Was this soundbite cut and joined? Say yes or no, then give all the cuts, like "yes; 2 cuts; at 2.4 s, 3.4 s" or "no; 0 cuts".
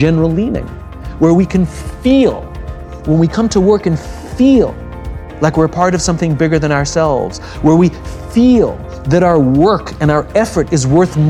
no; 0 cuts